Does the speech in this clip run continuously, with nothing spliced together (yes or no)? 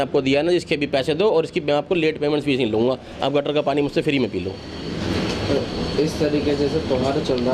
yes